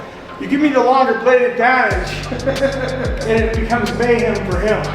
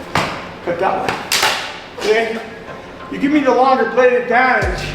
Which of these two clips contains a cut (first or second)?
second